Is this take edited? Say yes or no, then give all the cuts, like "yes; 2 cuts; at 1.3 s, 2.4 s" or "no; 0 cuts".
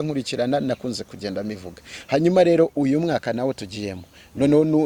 no; 0 cuts